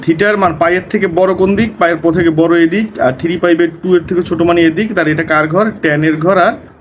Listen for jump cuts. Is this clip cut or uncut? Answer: uncut